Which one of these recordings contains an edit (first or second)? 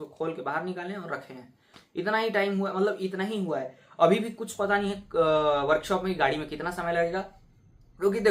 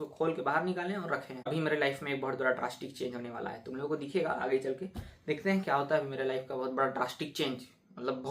second